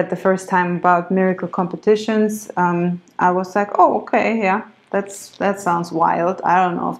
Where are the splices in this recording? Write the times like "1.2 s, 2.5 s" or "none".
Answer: none